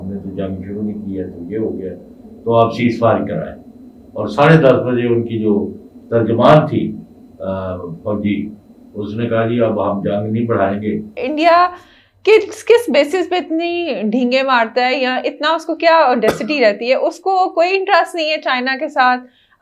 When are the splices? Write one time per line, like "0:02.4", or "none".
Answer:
0:11.2